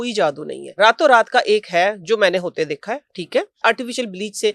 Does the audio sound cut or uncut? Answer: cut